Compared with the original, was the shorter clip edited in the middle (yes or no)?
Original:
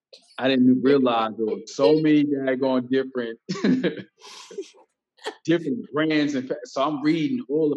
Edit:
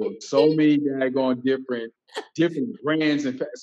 yes